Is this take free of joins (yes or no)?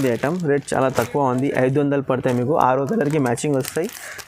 yes